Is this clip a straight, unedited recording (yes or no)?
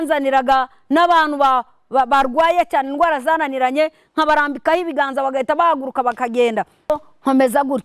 no